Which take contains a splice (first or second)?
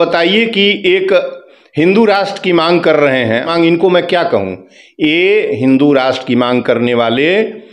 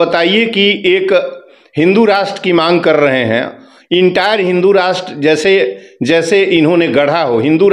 first